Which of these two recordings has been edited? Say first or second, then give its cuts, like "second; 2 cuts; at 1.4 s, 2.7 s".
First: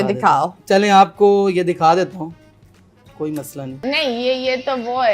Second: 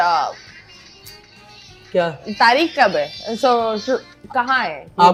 first; 1 cut; at 3.7 s